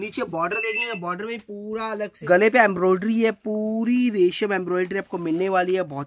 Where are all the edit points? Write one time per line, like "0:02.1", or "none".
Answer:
0:02.2